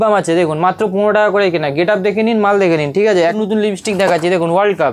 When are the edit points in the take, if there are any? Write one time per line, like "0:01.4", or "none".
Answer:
0:03.3